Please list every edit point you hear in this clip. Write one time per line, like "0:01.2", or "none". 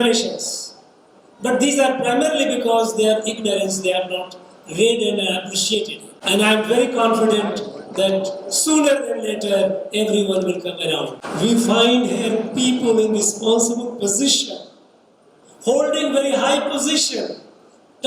0:06.1
0:11.2